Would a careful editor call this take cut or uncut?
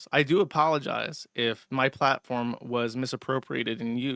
uncut